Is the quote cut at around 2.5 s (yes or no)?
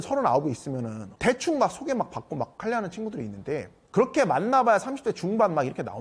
no